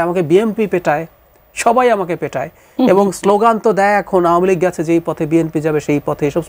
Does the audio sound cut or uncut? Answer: uncut